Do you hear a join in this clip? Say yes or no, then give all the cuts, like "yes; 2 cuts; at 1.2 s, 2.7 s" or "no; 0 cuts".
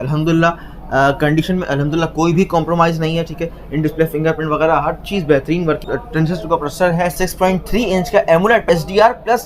yes; 3 cuts; at 5.8 s, 7.1 s, 8.6 s